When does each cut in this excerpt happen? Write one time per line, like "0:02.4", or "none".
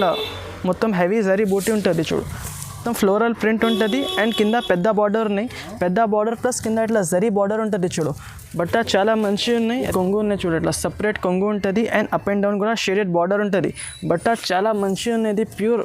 0:02.8
0:09.8